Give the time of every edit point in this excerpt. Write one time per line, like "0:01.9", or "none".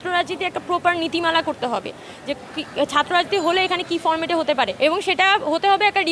none